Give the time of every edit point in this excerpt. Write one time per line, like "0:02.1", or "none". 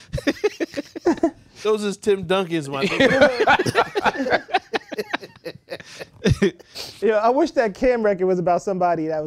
none